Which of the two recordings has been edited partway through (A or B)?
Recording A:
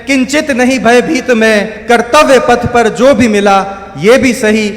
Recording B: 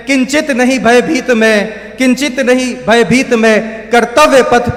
A